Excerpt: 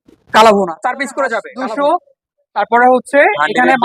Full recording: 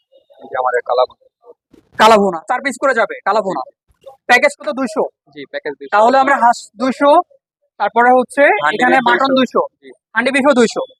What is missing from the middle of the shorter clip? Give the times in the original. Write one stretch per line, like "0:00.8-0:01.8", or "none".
0:03.1-0:06.7